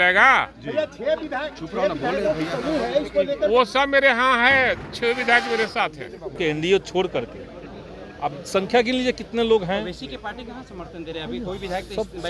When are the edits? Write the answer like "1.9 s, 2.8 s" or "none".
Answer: 6.3 s